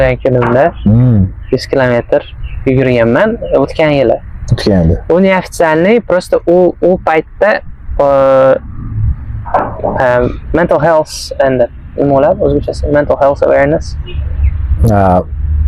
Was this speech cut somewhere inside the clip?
no; 0 cuts

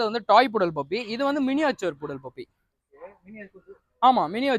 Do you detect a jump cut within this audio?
no; 0 cuts

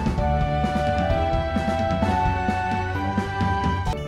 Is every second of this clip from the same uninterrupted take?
no; 1 cut; at 3.0 s

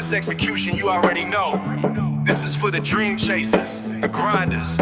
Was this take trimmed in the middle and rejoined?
no; 0 cuts

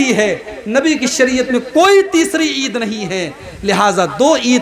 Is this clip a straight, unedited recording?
yes; 0 cuts

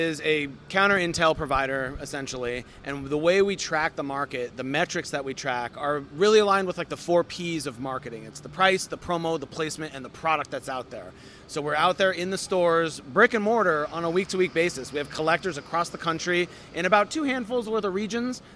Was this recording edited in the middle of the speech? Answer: no; 0 cuts

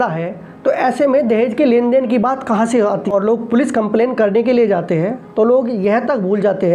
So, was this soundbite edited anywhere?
yes; 1 cut; at 3.1 s

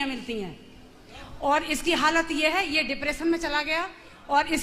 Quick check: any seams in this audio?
no; 0 cuts

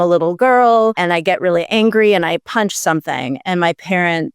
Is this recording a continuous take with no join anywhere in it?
no; 1 cut; at 1.0 s

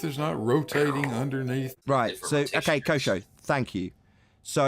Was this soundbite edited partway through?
yes; 1 cut; at 1.8 s

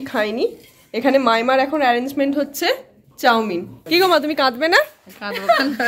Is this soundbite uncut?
no; 1 cut; at 3.7 s

